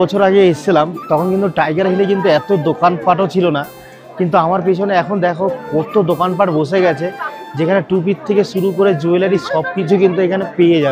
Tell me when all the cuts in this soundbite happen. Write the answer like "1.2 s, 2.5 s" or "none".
none